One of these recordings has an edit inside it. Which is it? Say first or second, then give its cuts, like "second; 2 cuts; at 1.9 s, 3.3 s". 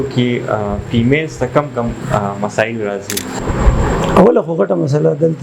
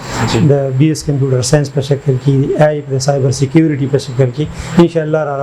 first; 1 cut; at 3.3 s